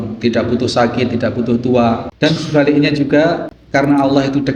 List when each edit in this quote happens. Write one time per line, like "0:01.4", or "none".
0:02.1
0:03.5